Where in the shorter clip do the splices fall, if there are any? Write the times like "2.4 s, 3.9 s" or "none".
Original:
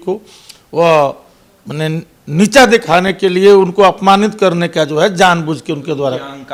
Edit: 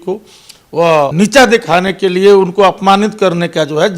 1.1 s